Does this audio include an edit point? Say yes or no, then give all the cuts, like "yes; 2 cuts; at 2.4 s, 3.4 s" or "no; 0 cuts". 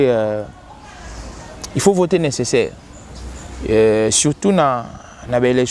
no; 0 cuts